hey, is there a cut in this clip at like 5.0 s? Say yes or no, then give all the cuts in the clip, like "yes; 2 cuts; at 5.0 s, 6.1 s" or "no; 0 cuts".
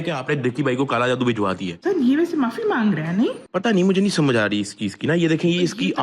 no; 1 cut; at 1.7 s